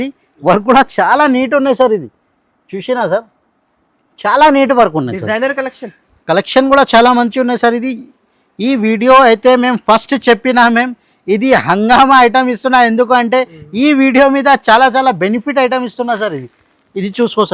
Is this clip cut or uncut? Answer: uncut